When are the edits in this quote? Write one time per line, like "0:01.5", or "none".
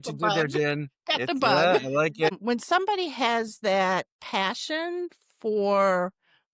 0:02.4
0:04.2

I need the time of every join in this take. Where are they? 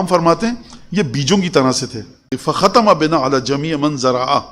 0:02.3

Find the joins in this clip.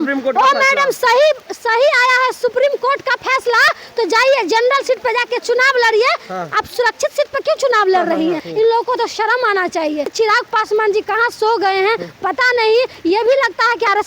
0:08.5
0:10.1

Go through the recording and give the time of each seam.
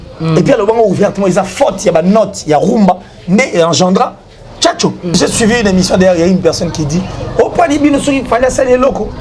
0:05.2

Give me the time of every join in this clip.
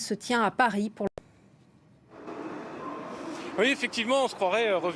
0:01.1

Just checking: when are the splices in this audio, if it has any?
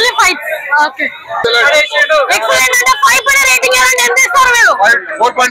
0:01.4

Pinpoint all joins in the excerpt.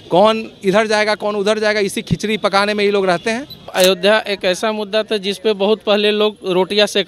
0:03.7

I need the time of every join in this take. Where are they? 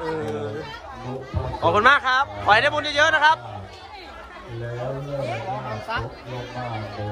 none

